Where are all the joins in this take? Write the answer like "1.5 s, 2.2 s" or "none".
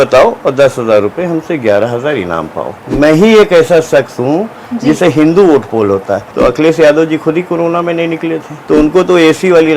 2.8 s, 6.3 s, 8.5 s

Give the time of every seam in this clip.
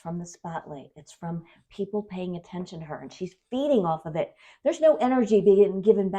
1.0 s

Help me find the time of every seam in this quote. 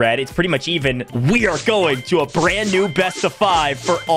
1.1 s

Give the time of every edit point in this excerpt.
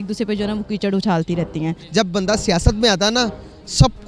1.8 s

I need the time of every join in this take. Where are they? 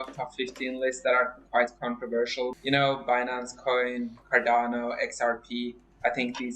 2.5 s

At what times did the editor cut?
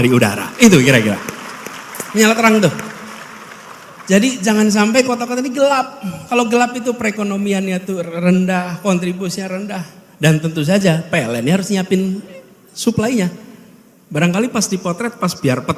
none

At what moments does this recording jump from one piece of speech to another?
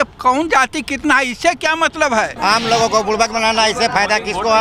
2.3 s

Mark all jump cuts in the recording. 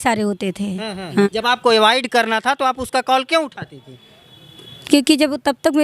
1.1 s

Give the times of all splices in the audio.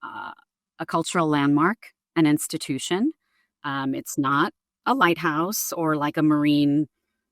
none

